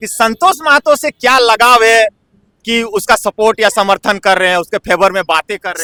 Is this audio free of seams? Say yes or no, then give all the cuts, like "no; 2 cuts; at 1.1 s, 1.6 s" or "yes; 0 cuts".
yes; 0 cuts